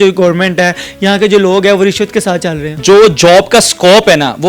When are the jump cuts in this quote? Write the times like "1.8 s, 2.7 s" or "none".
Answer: 2.7 s